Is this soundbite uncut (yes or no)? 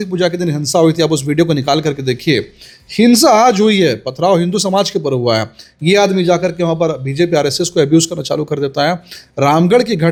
yes